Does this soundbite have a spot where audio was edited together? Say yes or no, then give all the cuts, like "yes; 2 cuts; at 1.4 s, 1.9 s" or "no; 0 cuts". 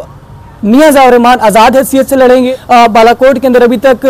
yes; 1 cut; at 2.5 s